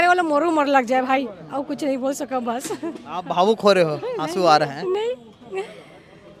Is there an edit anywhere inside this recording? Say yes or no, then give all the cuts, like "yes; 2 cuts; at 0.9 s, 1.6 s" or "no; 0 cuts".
no; 0 cuts